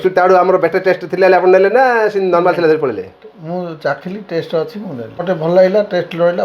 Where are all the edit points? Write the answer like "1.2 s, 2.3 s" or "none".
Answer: 5.2 s